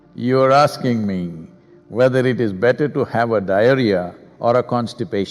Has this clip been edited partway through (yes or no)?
no